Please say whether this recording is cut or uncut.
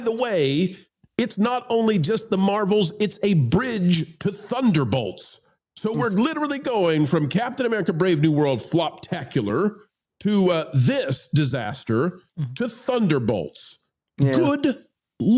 uncut